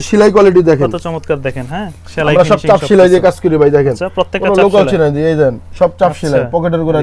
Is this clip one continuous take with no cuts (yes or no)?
yes